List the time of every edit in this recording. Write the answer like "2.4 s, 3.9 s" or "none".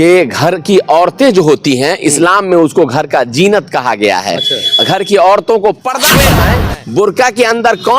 6.3 s